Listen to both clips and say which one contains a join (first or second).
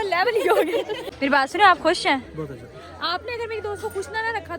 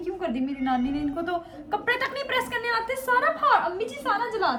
first